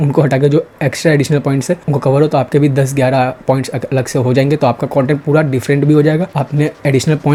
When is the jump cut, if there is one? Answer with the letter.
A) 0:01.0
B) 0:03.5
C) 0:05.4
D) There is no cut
D